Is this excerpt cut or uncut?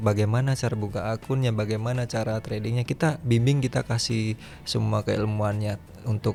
uncut